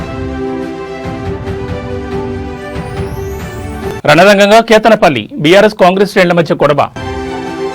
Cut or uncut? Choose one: uncut